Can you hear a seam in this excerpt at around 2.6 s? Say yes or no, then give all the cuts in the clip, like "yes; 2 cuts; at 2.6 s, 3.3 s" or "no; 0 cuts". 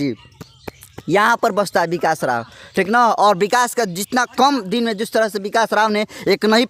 no; 0 cuts